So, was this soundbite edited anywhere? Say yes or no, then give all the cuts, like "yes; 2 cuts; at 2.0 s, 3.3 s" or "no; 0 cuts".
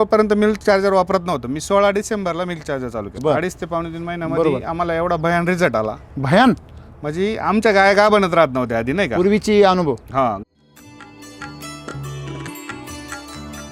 yes; 2 cuts; at 3.1 s, 10.4 s